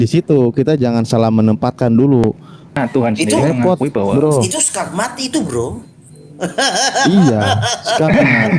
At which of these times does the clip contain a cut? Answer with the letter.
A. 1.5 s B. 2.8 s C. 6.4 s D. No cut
B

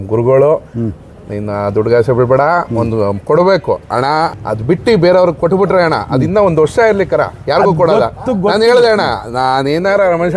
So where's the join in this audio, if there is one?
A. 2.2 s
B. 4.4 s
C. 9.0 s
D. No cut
B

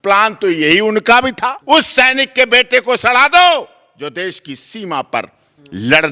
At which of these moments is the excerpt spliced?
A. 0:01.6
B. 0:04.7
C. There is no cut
A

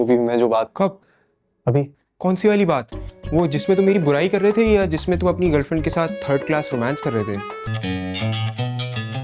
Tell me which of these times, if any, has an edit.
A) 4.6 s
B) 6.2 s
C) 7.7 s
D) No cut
C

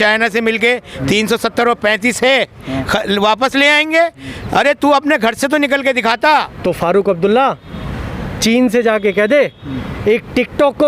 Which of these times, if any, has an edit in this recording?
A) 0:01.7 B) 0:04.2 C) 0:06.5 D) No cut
C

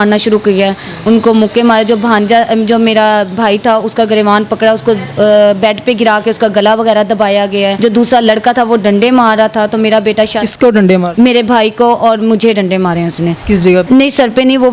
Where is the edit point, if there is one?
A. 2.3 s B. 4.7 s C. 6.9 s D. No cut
D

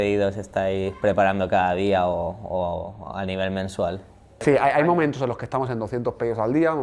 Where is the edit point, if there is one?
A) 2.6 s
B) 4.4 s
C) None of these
B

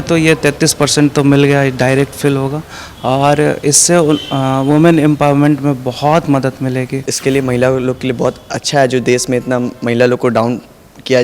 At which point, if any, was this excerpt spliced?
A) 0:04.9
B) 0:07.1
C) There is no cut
B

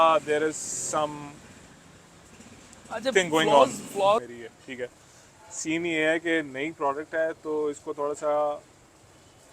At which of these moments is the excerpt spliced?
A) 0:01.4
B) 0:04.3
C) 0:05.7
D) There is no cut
B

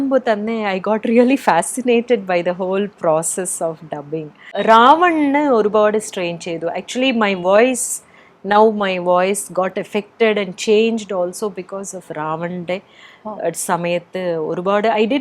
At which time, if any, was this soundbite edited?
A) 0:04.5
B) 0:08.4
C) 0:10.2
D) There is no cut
A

